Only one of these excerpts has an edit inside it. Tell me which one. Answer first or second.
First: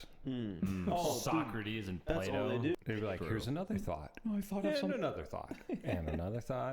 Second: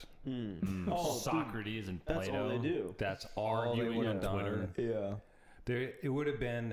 first